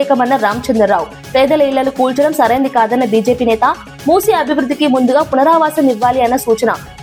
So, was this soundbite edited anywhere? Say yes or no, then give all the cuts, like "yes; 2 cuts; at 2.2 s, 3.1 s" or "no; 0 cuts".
no; 0 cuts